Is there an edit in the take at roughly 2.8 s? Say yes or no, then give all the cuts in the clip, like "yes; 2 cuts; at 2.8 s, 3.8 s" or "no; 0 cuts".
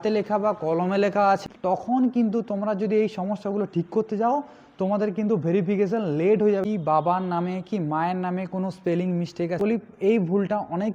no; 3 cuts; at 1.4 s, 6.6 s, 9.6 s